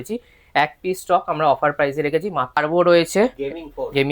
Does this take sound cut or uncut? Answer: cut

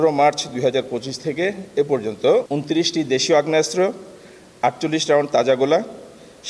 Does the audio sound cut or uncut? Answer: uncut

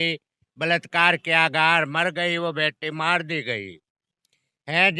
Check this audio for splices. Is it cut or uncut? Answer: uncut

